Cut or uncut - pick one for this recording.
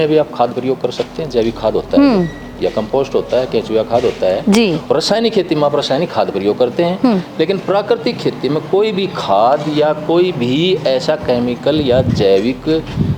uncut